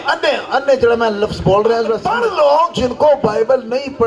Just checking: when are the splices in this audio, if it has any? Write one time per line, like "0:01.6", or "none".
0:02.1